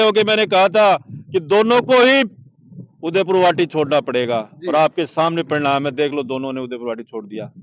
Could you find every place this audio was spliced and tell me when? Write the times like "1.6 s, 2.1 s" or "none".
none